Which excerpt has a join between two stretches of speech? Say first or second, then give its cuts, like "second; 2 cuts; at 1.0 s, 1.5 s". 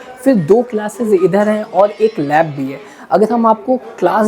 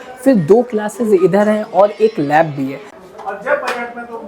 second; 1 cut; at 2.9 s